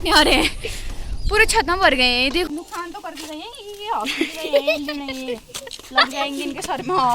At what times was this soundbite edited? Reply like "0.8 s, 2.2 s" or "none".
2.5 s